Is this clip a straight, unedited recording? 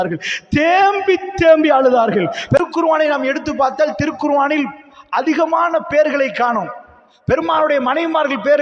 no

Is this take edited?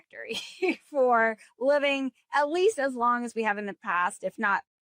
no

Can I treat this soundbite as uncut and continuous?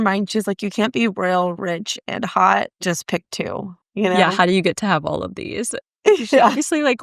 yes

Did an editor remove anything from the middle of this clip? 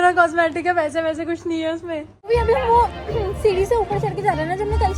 yes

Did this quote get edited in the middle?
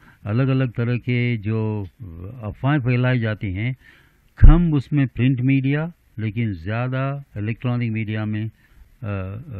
no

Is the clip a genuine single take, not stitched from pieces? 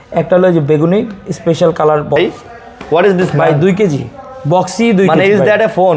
no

